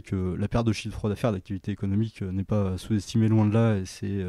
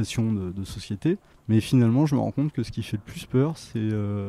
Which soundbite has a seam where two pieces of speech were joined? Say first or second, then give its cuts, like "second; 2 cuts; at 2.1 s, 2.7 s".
second; 1 cut; at 1.3 s